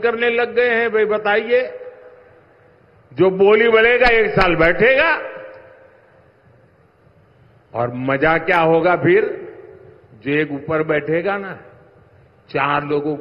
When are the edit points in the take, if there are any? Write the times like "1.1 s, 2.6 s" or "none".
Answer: none